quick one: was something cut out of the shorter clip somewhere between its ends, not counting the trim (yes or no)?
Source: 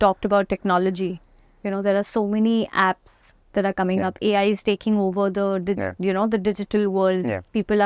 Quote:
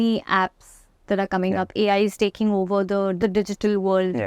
yes